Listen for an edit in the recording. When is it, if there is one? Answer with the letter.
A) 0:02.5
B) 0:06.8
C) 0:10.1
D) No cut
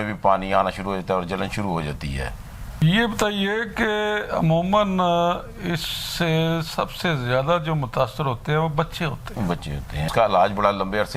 C